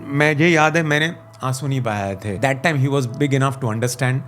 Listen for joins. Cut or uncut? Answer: cut